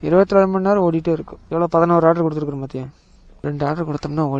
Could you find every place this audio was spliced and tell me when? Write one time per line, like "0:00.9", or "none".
0:01.4
0:03.4